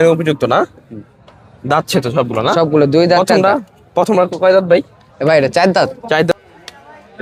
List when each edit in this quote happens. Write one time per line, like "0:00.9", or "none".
0:06.3